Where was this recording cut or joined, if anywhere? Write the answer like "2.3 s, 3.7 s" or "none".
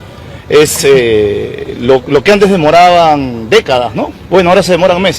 4.2 s